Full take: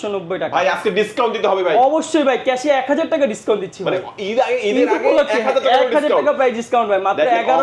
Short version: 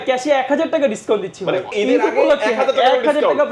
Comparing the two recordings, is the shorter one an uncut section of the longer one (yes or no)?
no